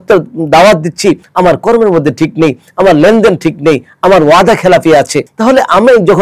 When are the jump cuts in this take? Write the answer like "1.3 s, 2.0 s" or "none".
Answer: 1.3 s, 5.2 s